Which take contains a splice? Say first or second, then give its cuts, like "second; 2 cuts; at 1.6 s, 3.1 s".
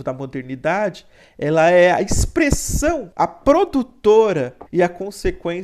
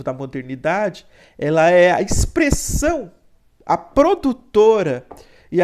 first; 2 cuts; at 3.1 s, 4.6 s